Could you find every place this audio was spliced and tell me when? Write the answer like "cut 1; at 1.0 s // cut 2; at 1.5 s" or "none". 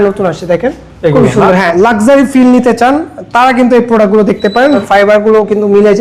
cut 1; at 1.7 s // cut 2; at 4.8 s